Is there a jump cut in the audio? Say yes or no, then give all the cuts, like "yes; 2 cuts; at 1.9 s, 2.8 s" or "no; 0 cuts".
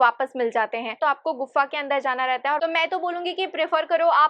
yes; 2 cuts; at 1.0 s, 2.6 s